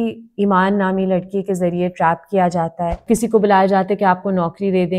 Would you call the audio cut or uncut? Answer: cut